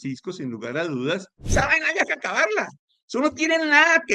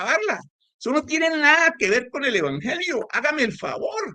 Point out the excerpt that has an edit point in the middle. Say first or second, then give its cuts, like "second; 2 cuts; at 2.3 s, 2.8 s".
first; 1 cut; at 1.4 s